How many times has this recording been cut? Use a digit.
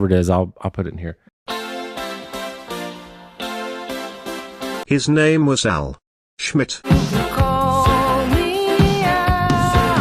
0